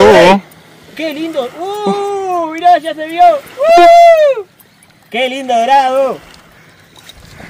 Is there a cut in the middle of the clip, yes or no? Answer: yes